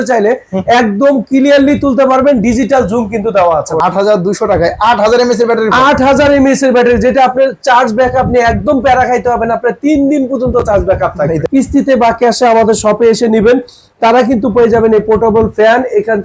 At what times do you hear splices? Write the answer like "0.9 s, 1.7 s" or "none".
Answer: 3.8 s, 11.4 s